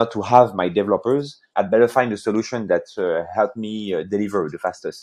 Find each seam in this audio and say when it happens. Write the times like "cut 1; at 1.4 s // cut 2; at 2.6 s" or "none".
cut 1; at 1.4 s